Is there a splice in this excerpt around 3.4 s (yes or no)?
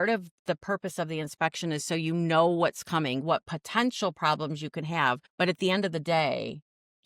no